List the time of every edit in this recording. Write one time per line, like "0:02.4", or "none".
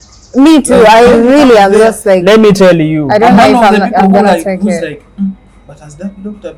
none